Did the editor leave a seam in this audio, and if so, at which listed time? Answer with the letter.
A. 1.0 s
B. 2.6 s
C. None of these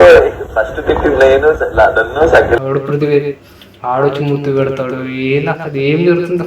B